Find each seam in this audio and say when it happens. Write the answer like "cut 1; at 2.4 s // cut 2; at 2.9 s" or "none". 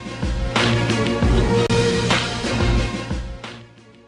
none